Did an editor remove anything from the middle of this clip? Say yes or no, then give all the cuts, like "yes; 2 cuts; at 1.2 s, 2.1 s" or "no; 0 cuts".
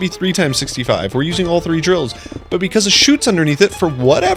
no; 0 cuts